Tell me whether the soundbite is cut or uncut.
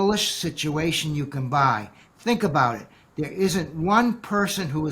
uncut